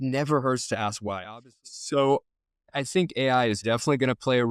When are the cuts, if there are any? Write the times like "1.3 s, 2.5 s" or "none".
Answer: 1.2 s